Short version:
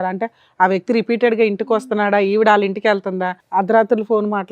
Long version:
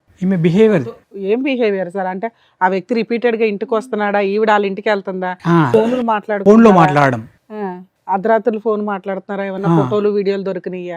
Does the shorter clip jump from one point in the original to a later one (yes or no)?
yes